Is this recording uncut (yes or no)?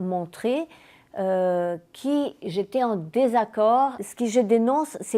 no